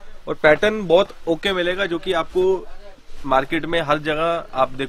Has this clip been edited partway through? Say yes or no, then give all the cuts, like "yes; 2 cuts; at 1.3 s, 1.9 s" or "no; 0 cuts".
no; 0 cuts